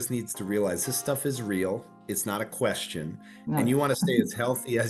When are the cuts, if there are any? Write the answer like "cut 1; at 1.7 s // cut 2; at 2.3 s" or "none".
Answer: none